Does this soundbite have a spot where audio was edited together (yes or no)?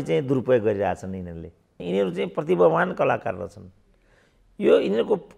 yes